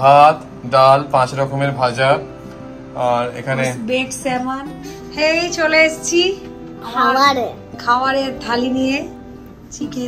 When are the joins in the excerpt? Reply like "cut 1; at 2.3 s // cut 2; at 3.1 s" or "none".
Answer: cut 1; at 4.8 s